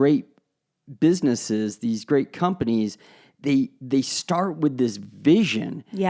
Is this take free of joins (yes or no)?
yes